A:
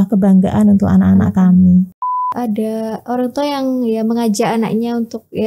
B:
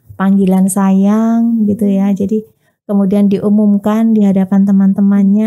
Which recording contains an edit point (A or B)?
A